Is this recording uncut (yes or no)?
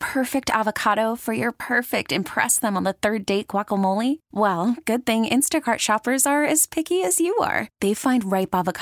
yes